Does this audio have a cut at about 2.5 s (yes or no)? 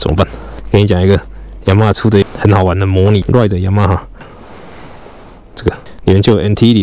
no